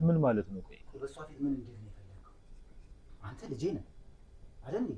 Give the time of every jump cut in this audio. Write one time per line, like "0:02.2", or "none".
none